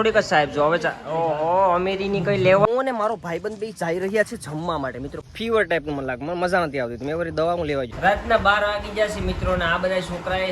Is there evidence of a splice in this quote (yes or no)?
yes